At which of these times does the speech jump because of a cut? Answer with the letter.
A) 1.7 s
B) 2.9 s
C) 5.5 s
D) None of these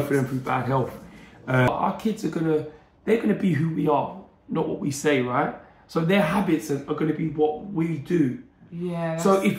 A